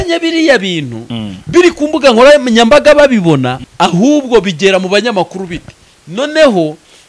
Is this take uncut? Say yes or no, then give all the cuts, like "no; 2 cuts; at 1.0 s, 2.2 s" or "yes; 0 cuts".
no; 1 cut; at 3.6 s